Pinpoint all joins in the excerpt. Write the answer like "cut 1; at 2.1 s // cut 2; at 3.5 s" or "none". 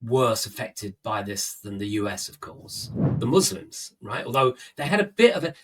cut 1; at 3.2 s